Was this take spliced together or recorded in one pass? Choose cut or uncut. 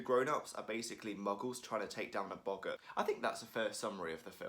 cut